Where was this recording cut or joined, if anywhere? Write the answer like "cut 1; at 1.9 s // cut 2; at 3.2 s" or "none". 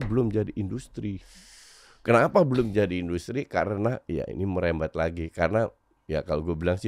none